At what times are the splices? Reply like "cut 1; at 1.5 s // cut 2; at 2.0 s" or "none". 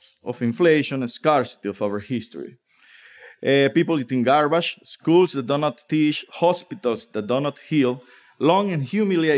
none